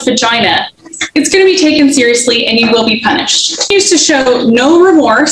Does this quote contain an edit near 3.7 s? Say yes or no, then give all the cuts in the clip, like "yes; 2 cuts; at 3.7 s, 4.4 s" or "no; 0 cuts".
yes; 1 cut; at 3.7 s